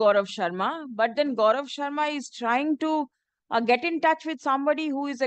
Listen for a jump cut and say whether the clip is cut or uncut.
uncut